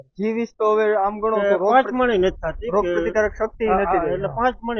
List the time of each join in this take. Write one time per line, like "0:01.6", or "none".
none